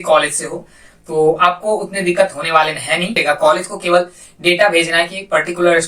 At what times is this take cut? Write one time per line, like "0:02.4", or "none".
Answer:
0:03.1